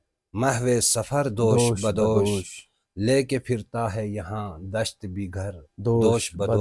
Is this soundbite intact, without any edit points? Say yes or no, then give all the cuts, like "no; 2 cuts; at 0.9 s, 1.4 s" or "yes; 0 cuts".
yes; 0 cuts